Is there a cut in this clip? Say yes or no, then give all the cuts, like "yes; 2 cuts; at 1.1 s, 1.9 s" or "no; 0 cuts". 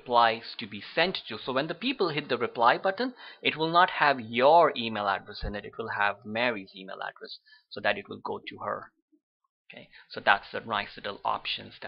no; 0 cuts